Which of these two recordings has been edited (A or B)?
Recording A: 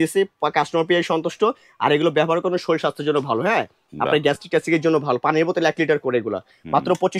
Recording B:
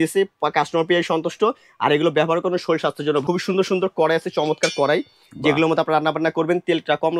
B